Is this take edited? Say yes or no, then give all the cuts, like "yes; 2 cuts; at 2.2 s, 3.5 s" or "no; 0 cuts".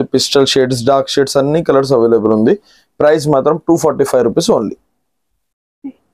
no; 0 cuts